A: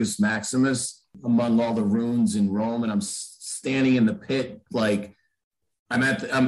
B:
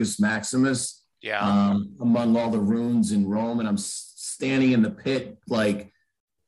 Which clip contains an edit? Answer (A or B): A